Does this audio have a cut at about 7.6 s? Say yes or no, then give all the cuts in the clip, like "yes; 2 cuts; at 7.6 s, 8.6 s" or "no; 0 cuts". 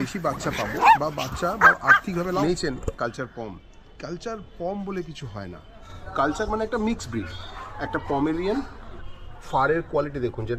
no; 2 cuts; at 2.4 s, 9.0 s